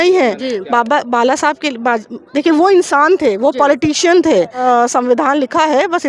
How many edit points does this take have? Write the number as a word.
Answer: one